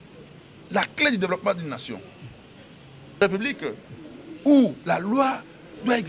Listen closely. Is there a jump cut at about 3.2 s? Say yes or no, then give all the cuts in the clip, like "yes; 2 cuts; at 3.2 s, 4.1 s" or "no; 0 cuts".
yes; 1 cut; at 3.2 s